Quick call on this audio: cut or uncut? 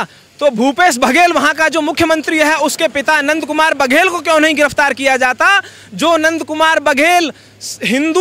uncut